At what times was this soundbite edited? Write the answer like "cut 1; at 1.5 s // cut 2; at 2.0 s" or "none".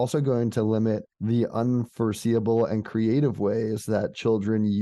cut 1; at 1.1 s